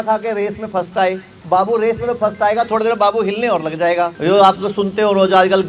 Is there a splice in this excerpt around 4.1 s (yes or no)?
yes